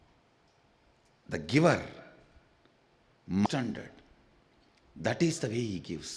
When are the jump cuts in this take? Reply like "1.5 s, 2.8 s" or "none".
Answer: 3.5 s